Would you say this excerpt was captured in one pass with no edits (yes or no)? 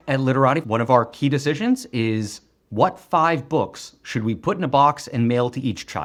yes